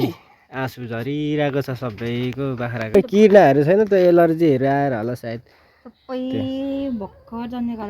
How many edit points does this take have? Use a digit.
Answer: 1